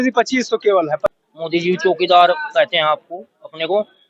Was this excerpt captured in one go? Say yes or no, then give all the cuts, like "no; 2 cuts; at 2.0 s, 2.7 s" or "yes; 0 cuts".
no; 1 cut; at 1.0 s